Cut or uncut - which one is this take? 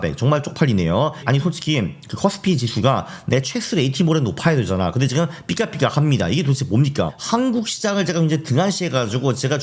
cut